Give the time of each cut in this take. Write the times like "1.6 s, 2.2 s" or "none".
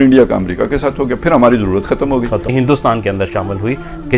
2.5 s